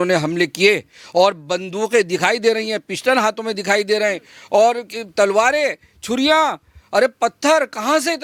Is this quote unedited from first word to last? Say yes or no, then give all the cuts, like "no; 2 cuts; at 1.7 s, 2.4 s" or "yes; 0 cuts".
yes; 0 cuts